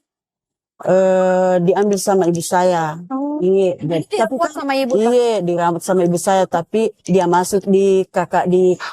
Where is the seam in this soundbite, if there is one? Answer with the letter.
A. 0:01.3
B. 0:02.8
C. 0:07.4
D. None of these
D